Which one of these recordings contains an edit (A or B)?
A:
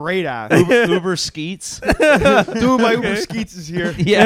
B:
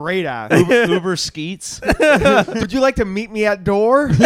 B